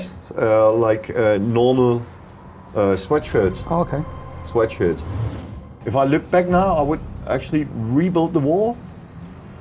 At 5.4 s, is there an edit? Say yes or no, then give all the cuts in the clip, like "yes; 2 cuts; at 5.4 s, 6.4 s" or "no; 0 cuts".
yes; 1 cut; at 5.4 s